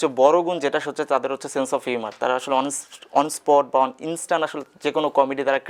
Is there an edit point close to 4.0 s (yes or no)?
no